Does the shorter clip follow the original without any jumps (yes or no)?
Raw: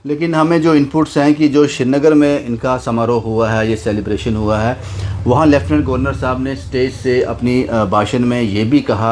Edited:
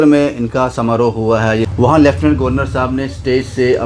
no